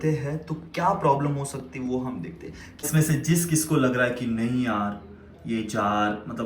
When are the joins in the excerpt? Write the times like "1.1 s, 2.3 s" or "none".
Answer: 2.8 s